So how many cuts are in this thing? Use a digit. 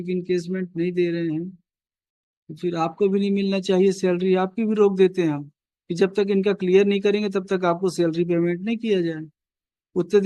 0